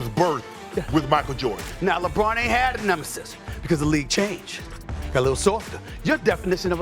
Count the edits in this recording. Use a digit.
1